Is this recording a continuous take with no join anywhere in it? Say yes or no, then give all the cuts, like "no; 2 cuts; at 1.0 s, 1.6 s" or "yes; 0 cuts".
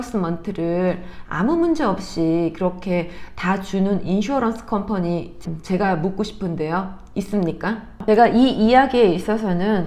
no; 1 cut; at 7.9 s